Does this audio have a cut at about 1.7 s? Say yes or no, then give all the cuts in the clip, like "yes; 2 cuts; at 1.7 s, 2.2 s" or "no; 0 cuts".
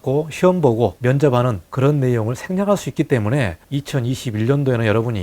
yes; 3 cuts; at 1.0 s, 1.7 s, 3.6 s